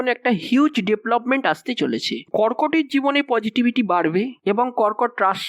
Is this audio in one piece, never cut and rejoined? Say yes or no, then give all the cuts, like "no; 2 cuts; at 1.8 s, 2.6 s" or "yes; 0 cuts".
no; 1 cut; at 2.1 s